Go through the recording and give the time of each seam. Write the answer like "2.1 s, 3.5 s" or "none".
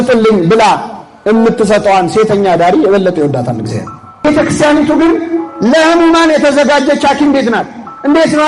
4.2 s